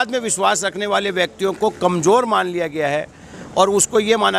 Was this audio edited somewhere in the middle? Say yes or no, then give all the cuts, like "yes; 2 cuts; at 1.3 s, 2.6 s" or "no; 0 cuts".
no; 0 cuts